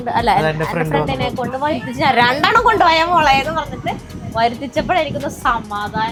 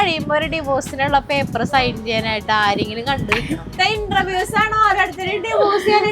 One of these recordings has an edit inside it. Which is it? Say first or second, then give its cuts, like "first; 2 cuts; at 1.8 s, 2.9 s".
second; 1 cut; at 3.7 s